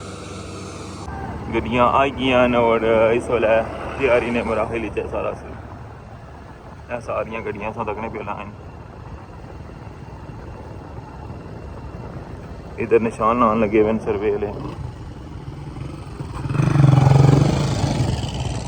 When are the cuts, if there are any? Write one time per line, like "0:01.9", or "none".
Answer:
0:01.1